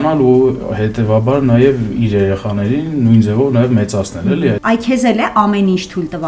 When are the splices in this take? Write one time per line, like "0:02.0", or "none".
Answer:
0:04.6

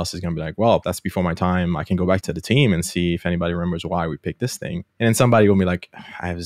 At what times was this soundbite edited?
0:00.9
0:02.2
0:04.9

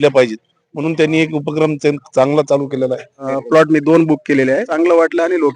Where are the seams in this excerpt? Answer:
0:03.3
0:04.7

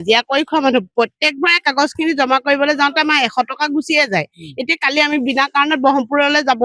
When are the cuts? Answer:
none

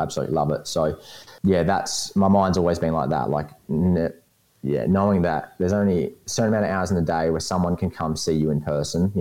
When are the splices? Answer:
0:01.3

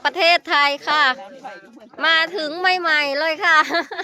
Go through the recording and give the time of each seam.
none

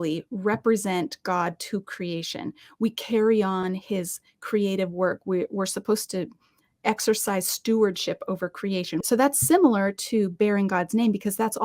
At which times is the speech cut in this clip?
0:09.0

